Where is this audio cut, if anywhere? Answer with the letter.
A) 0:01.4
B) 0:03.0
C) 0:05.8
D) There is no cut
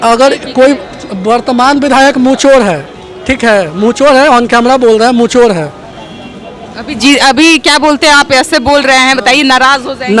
D